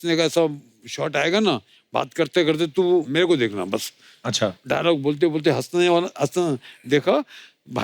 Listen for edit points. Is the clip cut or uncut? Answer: cut